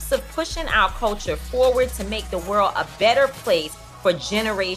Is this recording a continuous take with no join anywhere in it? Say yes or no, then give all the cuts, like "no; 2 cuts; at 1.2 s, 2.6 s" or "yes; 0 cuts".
yes; 0 cuts